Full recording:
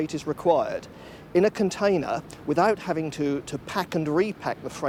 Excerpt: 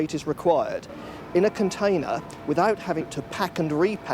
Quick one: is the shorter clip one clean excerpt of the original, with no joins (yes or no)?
no